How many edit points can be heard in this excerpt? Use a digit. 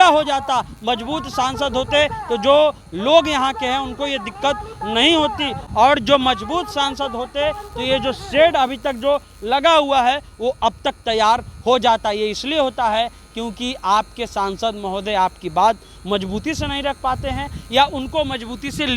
0